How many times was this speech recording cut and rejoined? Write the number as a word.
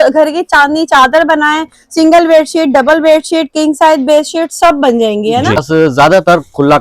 one